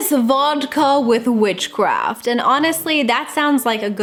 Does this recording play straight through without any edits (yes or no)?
yes